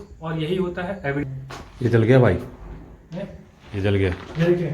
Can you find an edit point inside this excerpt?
yes; 1 cut; at 1.2 s

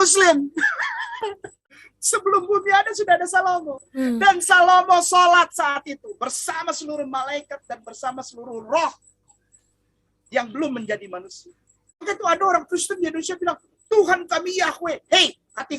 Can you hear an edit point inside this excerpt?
yes; 2 cuts; at 1.5 s, 12.0 s

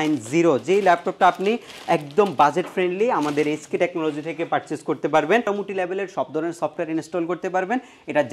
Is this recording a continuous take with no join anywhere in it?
no; 1 cut; at 5.4 s

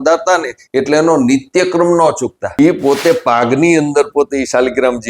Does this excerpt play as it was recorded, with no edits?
no; 1 cut; at 2.4 s

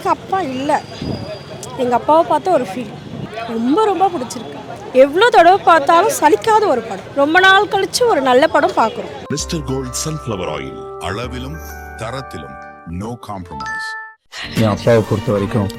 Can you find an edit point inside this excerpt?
yes; 1 cut; at 9.2 s

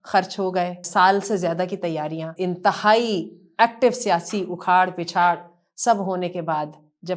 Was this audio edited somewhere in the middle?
yes; 2 cuts; at 0.8 s, 2.3 s

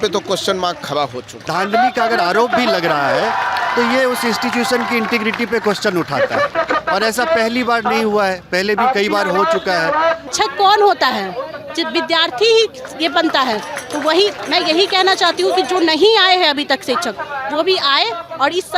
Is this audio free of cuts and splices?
no; 2 cuts; at 1.3 s, 10.3 s

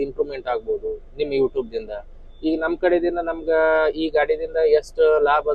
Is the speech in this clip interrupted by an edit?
no; 0 cuts

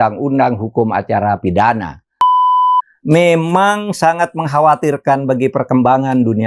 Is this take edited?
yes; 1 cut; at 2.5 s

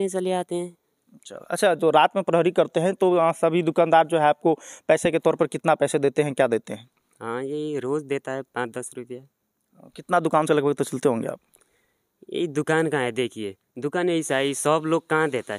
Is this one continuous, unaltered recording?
yes; 0 cuts

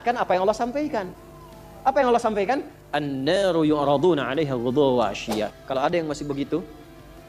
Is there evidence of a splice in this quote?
yes; 1 cut; at 5.6 s

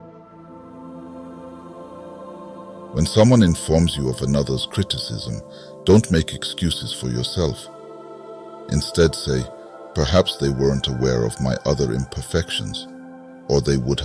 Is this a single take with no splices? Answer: no; 2 cuts; at 0.9 s, 2.9 s

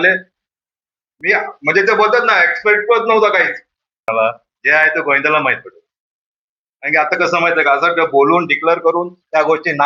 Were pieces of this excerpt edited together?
yes; 1 cut; at 4.1 s

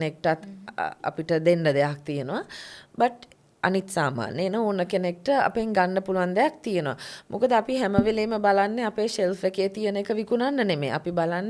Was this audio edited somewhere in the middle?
no; 0 cuts

